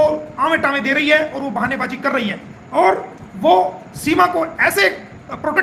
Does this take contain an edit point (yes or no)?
no